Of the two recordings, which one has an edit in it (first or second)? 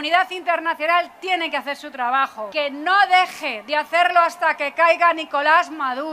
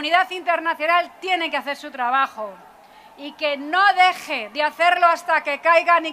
first